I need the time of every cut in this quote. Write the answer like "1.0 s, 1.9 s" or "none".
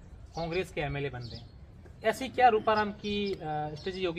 none